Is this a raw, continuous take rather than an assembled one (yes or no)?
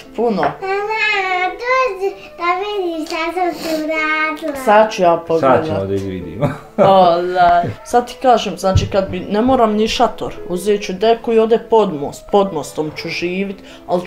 no